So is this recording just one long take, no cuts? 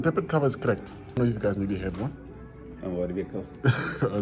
no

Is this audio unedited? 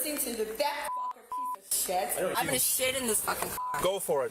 no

